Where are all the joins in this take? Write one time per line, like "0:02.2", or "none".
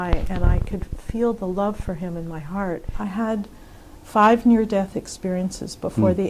0:02.9